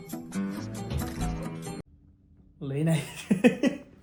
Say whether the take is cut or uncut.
uncut